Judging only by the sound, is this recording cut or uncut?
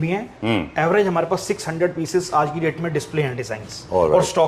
uncut